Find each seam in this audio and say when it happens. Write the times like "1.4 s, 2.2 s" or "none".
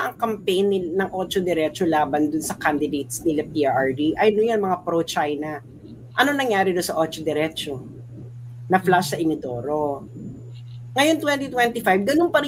none